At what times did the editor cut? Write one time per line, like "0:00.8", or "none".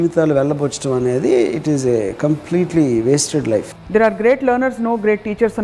0:03.8